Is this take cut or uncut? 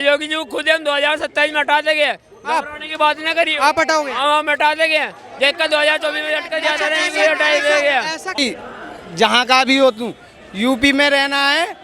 cut